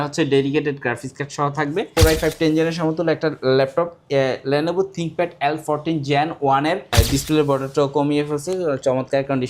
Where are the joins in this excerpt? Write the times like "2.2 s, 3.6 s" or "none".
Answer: 1.9 s, 6.9 s